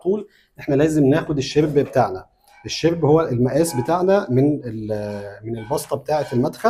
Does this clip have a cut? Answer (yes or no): no